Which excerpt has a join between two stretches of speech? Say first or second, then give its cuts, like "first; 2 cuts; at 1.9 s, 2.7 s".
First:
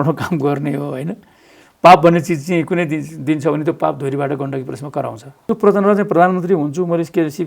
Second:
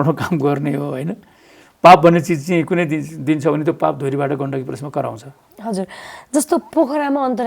first; 1 cut; at 5.5 s